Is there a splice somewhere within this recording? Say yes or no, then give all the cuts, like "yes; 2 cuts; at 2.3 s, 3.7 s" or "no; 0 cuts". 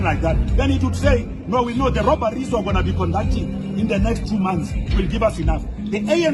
no; 0 cuts